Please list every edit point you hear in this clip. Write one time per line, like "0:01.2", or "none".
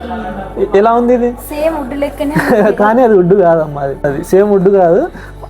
0:04.1